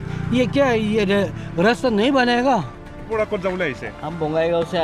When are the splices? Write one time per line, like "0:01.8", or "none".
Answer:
0:03.0